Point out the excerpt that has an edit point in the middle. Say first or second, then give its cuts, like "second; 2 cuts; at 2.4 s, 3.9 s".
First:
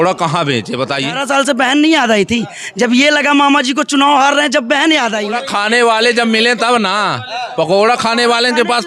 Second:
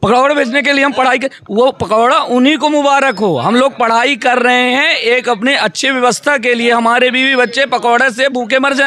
first; 2 cuts; at 1.2 s, 5.2 s